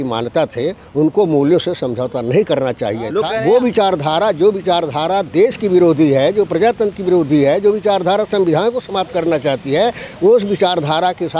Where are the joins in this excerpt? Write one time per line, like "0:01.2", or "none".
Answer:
0:03.3